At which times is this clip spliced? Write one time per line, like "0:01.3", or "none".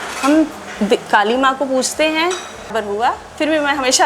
0:02.3